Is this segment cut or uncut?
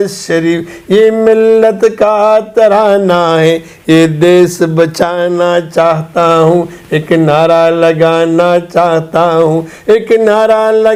uncut